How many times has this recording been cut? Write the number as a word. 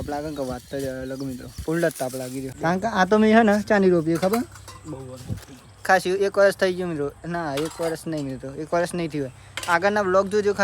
one